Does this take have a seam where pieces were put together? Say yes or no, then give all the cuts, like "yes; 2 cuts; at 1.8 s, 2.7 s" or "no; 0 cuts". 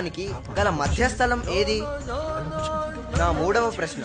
no; 0 cuts